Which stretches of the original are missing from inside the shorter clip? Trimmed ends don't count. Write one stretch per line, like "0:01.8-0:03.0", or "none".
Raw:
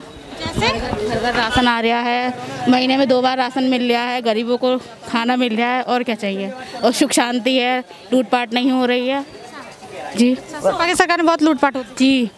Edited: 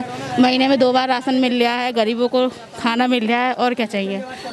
none